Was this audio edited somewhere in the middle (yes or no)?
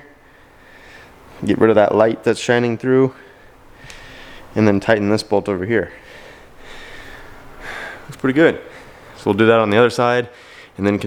no